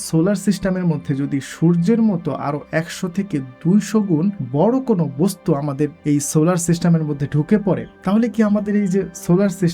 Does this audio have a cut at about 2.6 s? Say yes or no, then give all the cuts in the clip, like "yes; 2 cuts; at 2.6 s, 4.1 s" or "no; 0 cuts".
no; 3 cuts; at 4.4 s, 6.0 s, 7.9 s